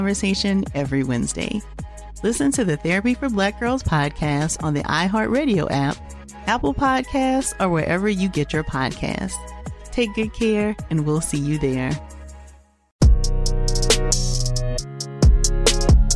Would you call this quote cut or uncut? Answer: cut